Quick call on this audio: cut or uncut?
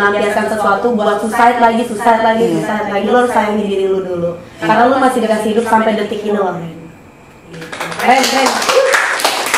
uncut